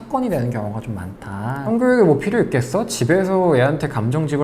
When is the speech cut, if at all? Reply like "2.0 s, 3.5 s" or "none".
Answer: 1.6 s